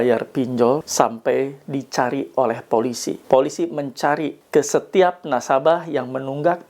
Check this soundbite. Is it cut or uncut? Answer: cut